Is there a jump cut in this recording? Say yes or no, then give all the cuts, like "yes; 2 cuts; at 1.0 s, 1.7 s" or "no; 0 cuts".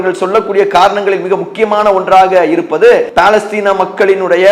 yes; 1 cut; at 3.1 s